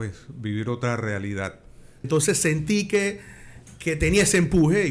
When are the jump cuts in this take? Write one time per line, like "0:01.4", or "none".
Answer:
0:02.1